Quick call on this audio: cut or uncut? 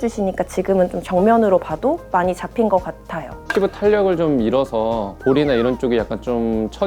cut